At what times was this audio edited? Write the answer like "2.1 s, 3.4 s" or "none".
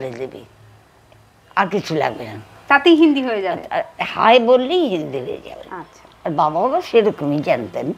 none